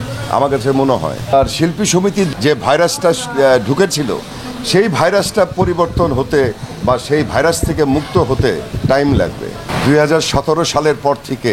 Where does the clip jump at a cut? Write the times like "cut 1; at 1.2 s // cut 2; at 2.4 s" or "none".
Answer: cut 1; at 1.3 s // cut 2; at 2.3 s // cut 3; at 8.7 s // cut 4; at 9.6 s